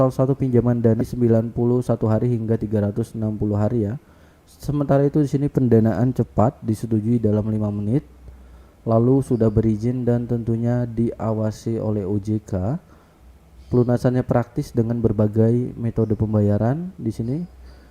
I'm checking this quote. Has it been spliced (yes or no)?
yes